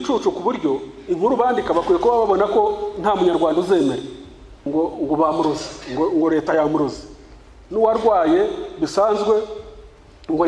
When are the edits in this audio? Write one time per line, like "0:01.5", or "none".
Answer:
0:04.6